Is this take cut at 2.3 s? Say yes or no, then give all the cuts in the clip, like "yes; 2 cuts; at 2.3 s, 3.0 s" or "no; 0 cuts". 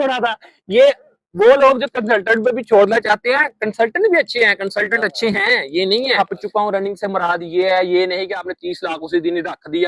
no; 1 cut; at 6.2 s